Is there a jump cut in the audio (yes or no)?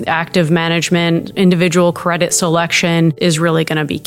yes